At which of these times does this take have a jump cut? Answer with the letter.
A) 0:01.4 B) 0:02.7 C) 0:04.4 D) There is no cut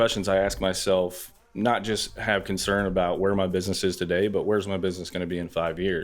A